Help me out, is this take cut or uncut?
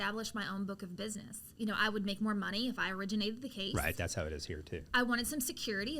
cut